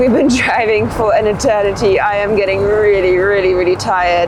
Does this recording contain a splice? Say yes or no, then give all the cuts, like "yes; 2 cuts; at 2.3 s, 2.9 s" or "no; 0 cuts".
no; 0 cuts